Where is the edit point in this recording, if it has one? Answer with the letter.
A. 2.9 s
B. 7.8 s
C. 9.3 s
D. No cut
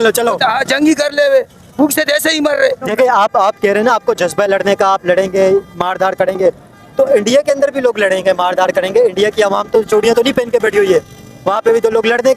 A